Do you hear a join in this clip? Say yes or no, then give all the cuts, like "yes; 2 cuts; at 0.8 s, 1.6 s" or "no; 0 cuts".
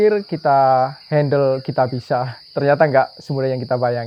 no; 0 cuts